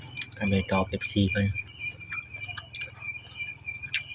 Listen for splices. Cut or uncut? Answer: uncut